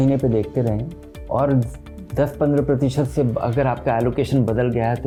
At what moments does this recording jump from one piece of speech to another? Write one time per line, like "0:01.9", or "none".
none